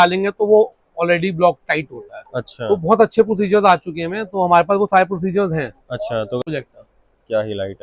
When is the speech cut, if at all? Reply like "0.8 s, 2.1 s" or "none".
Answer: 6.4 s